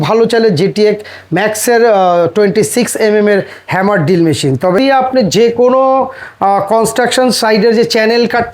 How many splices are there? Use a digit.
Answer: 1